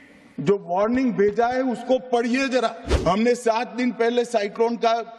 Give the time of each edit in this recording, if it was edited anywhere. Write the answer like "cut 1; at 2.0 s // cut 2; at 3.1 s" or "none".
cut 1; at 2.9 s